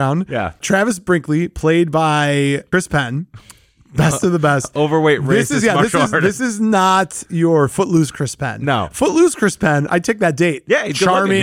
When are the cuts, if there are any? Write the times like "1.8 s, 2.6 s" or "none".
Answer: none